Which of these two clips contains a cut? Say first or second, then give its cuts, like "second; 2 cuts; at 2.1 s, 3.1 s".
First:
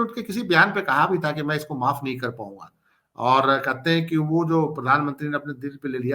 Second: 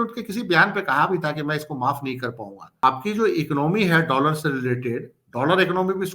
second; 1 cut; at 2.8 s